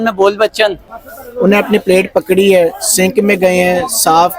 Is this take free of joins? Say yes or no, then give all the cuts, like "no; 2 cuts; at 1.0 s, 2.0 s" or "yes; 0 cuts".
no; 1 cut; at 0.9 s